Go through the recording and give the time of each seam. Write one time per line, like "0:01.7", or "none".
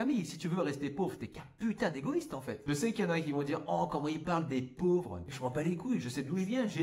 0:02.6